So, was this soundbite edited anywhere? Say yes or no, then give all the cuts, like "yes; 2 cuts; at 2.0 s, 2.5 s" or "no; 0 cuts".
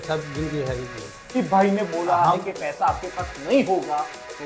yes; 1 cut; at 1.3 s